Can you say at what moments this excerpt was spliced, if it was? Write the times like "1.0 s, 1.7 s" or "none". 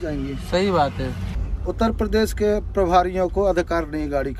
1.3 s